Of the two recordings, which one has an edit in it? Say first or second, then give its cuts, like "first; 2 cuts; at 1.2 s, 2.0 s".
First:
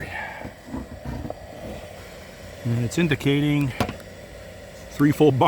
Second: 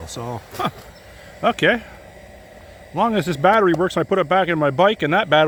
first; 1 cut; at 2.0 s